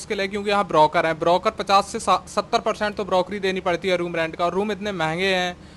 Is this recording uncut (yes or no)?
yes